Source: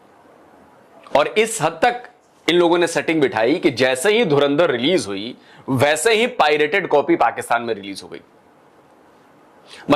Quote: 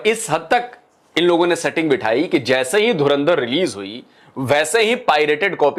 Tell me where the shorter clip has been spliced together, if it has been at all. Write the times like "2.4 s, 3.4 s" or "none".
none